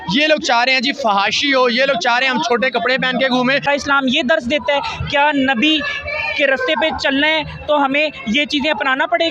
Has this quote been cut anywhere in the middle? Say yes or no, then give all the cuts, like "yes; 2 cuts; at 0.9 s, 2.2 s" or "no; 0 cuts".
yes; 1 cut; at 3.6 s